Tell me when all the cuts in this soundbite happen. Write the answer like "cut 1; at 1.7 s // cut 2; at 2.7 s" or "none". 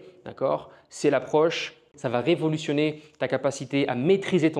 cut 1; at 1.9 s

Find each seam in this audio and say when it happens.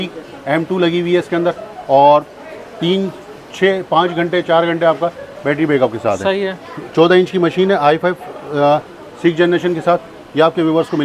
none

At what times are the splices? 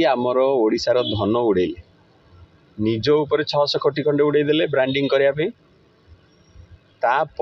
none

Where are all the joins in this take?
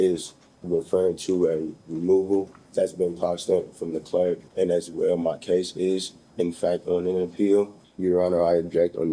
cut 1; at 2.6 s // cut 2; at 4.5 s // cut 3; at 7.8 s

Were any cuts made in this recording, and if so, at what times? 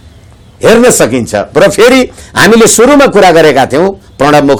none

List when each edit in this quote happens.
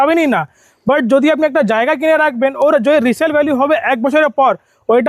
none

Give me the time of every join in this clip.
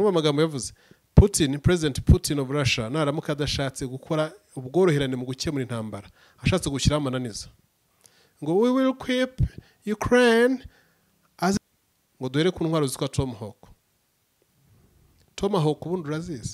cut 1; at 11.6 s

